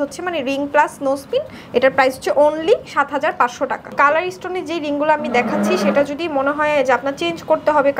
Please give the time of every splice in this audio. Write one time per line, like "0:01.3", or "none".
0:03.9